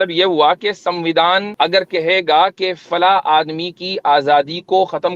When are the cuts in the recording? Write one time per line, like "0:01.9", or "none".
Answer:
0:01.5